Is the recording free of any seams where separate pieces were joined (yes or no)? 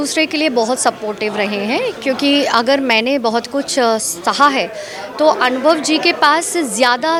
yes